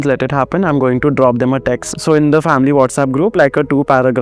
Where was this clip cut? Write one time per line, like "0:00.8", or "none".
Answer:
0:01.9
0:03.3